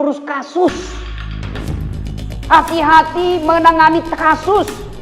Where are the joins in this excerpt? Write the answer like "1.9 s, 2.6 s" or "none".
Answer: 1.1 s, 2.2 s